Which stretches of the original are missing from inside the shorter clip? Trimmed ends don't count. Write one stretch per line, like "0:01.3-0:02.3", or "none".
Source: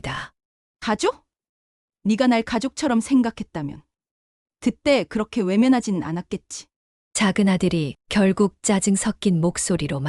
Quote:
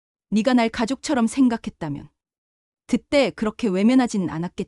none